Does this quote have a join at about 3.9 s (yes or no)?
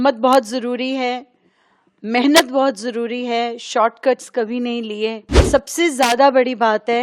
no